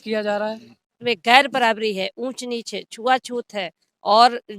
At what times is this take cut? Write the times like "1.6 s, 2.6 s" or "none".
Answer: 1.0 s